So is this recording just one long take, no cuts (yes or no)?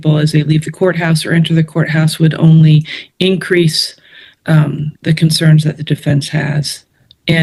yes